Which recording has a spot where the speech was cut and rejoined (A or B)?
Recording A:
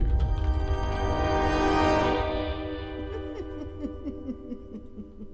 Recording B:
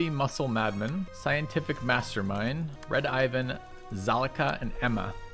B